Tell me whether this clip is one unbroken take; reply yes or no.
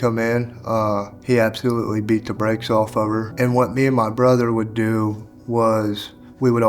no